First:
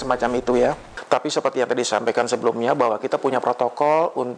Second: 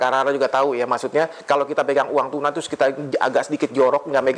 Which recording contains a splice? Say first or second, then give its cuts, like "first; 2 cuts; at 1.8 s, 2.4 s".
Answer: first; 1 cut; at 0.9 s